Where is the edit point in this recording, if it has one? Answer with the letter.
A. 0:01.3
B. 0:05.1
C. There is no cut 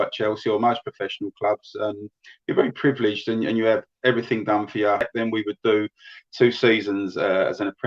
B